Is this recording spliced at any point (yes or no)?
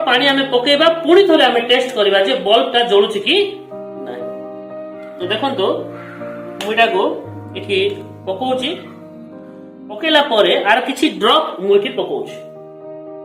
yes